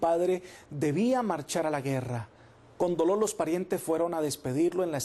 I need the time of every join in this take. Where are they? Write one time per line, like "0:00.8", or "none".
0:01.6